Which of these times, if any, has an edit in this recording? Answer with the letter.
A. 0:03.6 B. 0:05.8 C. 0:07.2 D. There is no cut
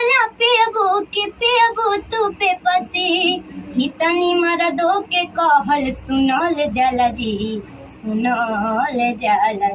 D